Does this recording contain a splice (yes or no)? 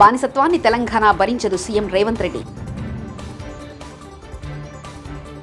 no